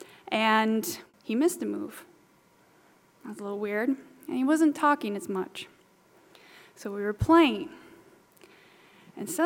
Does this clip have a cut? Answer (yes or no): yes